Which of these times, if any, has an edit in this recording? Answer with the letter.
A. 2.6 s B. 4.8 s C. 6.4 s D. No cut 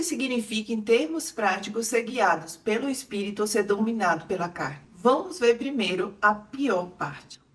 D